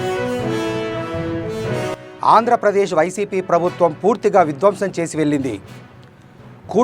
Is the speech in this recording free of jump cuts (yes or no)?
yes